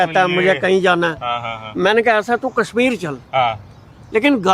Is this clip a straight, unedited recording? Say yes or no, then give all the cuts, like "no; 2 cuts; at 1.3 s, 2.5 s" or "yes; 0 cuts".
yes; 0 cuts